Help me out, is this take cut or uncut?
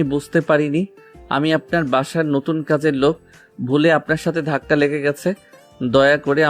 uncut